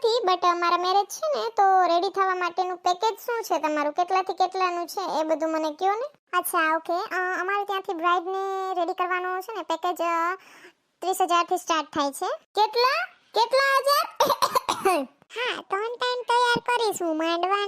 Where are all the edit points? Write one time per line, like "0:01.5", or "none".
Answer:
0:15.2